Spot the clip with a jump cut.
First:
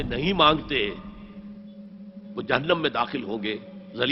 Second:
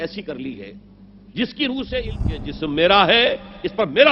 second; 1 cut; at 2.2 s

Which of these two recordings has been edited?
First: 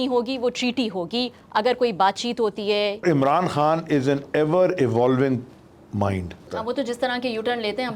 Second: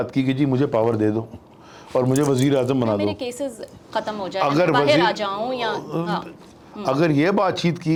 first; 2 cuts; at 3.0 s, 6.5 s

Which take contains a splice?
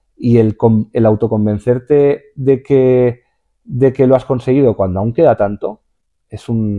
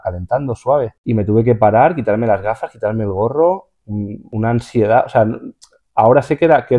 second; 2 cuts; at 1.0 s, 4.2 s

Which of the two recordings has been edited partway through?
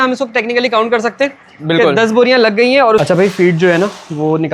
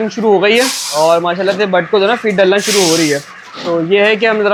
first; 1 cut; at 3.0 s

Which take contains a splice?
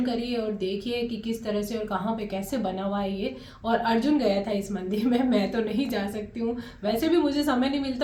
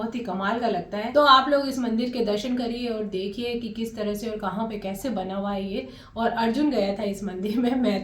second; 1 cut; at 1.1 s

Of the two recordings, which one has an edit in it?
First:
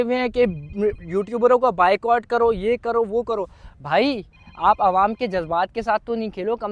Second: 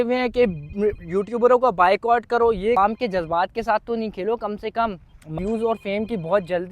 second; 2 cuts; at 2.8 s, 5.4 s

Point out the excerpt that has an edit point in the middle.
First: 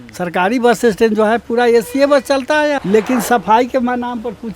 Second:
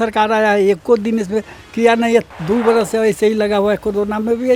first; 1 cut; at 2.8 s

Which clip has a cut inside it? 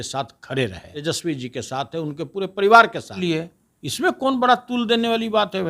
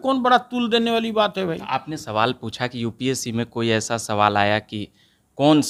first; 2 cuts; at 0.9 s, 3.2 s

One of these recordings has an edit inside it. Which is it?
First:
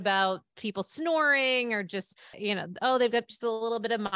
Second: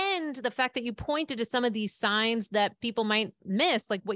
first; 1 cut; at 2.4 s

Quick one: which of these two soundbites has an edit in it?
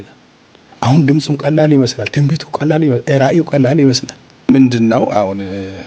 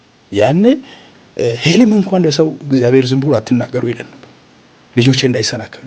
first; 1 cut; at 4.5 s

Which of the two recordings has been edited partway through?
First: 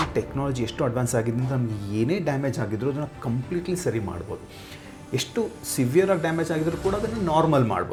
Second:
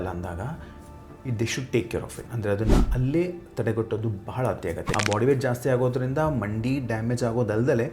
second; 1 cut; at 4.8 s

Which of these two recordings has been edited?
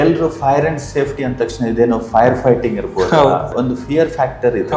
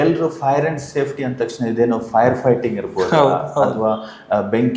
first; 1 cut; at 3.5 s

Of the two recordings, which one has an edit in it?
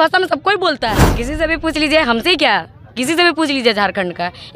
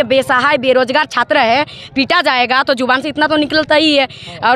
first; 1 cut; at 1.1 s

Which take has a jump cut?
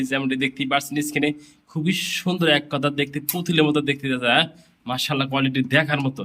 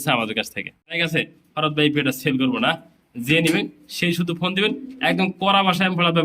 second; 1 cut; at 1.0 s

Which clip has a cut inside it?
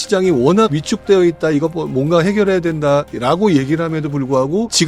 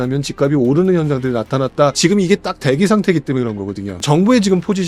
second; 2 cuts; at 2.0 s, 4.0 s

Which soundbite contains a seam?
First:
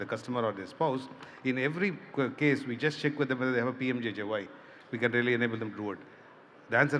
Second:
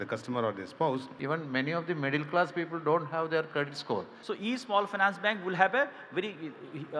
second; 2 cuts; at 1.1 s, 4.2 s

